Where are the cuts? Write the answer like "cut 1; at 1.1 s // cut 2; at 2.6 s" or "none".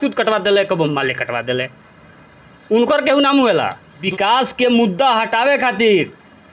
cut 1; at 4.1 s